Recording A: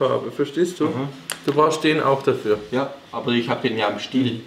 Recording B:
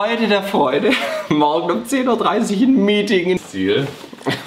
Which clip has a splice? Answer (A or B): B